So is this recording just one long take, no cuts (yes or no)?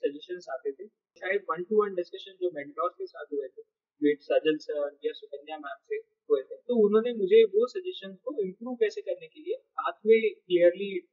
no